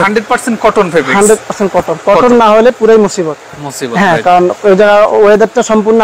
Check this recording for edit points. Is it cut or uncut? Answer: uncut